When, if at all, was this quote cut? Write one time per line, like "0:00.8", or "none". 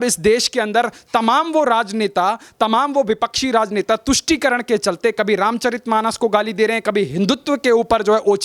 none